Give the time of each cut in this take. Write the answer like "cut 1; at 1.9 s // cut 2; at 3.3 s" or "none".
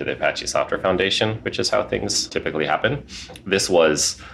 cut 1; at 2.3 s